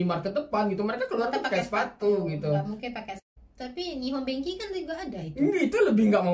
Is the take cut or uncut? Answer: cut